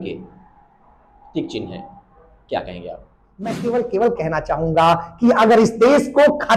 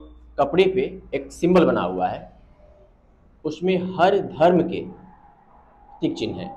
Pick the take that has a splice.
first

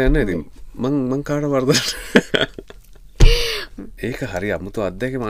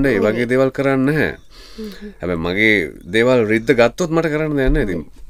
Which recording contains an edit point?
first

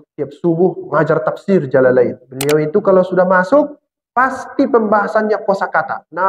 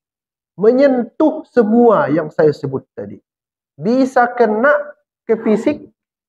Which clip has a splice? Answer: first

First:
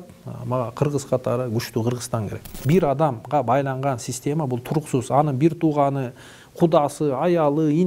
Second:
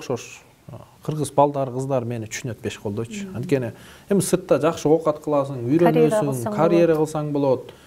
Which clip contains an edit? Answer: first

